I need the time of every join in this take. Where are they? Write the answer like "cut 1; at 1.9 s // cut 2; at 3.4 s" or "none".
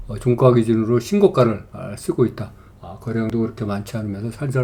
none